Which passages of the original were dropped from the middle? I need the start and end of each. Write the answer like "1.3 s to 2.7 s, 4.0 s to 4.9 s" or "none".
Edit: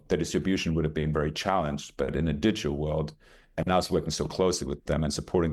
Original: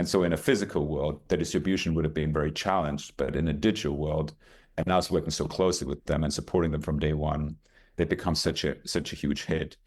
none